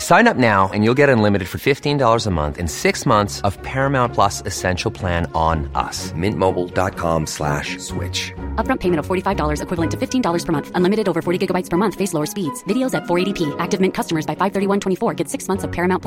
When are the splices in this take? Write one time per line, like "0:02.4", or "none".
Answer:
none